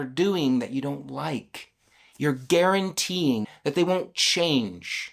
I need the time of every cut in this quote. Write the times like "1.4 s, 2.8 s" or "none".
3.5 s